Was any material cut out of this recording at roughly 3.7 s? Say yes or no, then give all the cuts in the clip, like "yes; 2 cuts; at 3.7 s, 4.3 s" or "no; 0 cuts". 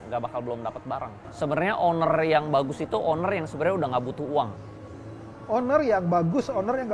no; 1 cut; at 1.2 s